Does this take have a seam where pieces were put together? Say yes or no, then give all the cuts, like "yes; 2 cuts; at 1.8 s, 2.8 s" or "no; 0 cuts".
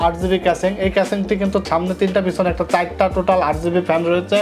no; 0 cuts